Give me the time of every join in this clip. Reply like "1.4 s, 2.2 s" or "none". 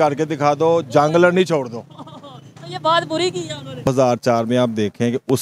3.9 s